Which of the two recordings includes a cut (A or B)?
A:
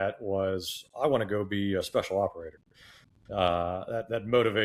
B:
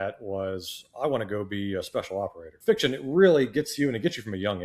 B